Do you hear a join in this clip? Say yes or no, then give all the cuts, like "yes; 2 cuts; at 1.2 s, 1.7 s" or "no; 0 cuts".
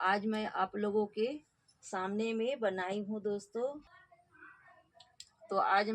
yes; 1 cut; at 3.8 s